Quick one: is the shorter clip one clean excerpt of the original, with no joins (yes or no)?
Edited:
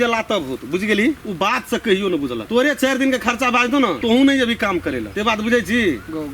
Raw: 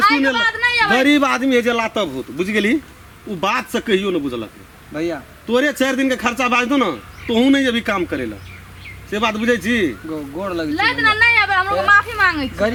no